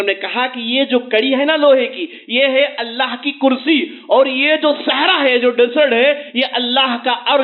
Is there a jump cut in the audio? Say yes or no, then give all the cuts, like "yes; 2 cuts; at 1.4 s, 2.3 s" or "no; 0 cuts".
no; 0 cuts